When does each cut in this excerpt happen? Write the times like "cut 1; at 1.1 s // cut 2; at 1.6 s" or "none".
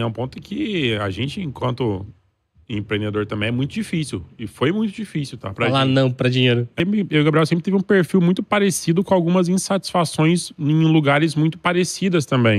cut 1; at 6.7 s